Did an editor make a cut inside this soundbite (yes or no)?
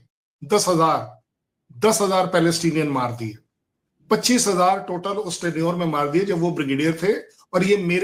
no